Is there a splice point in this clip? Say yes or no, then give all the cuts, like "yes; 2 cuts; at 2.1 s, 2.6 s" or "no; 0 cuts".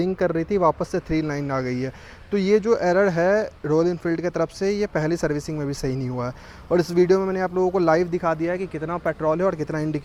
no; 0 cuts